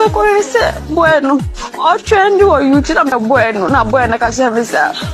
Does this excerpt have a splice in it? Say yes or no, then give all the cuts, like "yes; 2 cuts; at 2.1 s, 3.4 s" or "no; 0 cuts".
yes; 1 cut; at 3.2 s